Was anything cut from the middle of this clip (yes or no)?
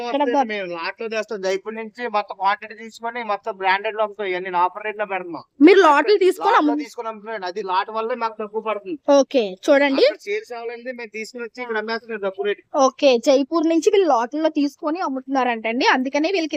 no